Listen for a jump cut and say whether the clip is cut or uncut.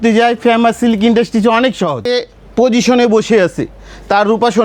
cut